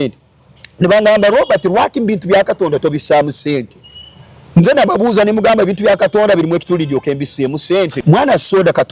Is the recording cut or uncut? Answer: cut